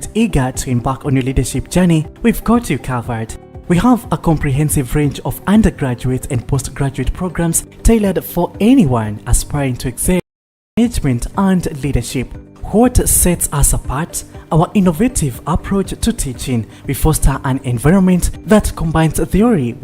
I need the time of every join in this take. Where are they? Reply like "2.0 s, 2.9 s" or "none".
10.7 s